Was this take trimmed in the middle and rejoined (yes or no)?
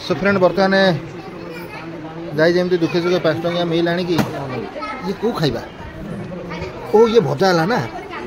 no